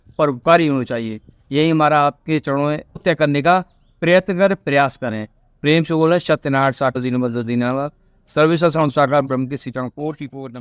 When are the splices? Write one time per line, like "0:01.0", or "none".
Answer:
0:03.0
0:07.0